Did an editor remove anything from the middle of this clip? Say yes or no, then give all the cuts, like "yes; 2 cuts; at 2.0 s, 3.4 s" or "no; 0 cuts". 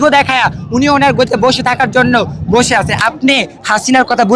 yes; 1 cut; at 2.9 s